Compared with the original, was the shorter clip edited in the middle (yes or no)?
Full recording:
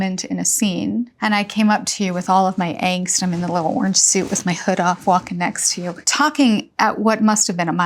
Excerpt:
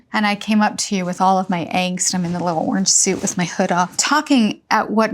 yes